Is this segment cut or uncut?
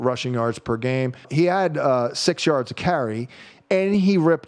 cut